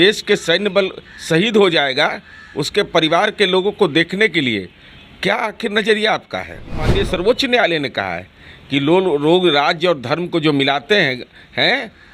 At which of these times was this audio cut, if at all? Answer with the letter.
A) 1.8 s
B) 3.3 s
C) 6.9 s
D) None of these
C